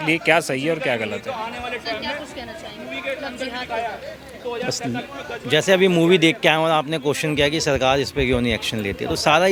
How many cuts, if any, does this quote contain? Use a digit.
0